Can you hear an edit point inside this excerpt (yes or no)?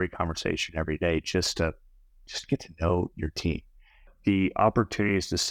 yes